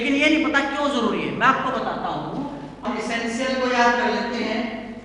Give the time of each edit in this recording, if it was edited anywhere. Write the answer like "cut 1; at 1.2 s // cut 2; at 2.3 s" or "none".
cut 1; at 2.9 s